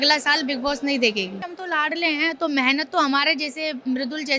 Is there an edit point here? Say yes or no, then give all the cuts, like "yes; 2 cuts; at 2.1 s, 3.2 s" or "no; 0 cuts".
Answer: yes; 1 cut; at 1.5 s